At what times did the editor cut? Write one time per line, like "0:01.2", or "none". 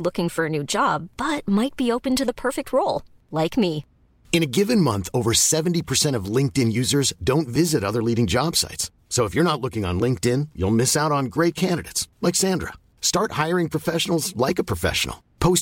none